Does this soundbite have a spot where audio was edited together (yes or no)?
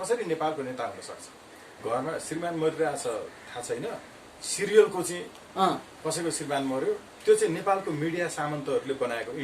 yes